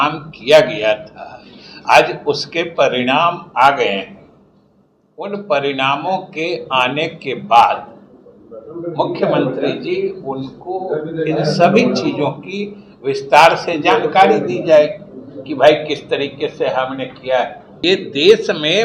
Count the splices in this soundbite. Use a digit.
1